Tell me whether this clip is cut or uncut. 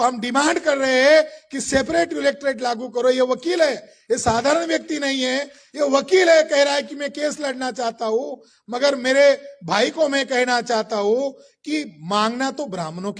uncut